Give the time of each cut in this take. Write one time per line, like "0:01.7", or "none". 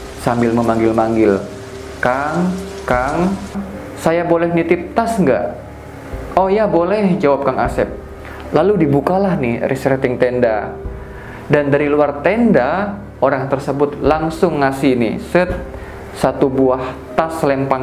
0:03.7